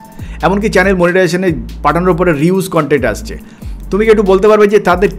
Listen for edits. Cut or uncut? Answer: uncut